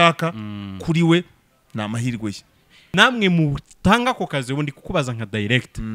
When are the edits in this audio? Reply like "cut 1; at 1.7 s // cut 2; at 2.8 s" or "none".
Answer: cut 1; at 2.9 s